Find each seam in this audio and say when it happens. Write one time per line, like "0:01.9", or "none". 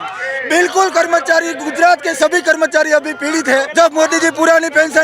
0:03.7